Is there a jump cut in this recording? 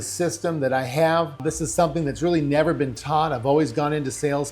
yes; 1 cut; at 1.4 s

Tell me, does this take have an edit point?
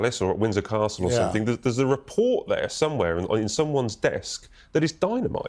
no; 0 cuts

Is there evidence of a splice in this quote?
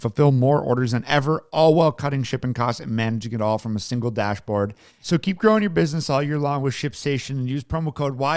yes; 1 cut; at 4.9 s

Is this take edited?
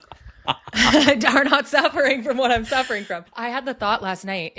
yes; 1 cut; at 3.3 s

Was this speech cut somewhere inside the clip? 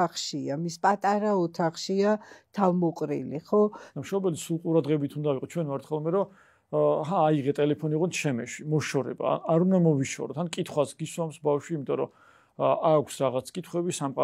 no; 0 cuts

